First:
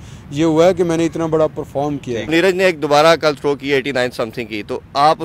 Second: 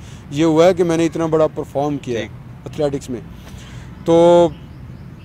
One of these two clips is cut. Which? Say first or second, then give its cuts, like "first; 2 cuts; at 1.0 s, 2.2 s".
first; 1 cut; at 2.3 s